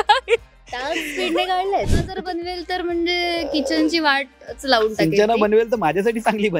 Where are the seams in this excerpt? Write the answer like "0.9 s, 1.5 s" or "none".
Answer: 1.9 s